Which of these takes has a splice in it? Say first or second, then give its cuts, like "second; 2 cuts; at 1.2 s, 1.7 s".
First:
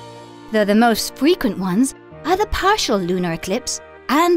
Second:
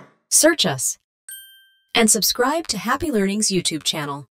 first; 1 cut; at 2.1 s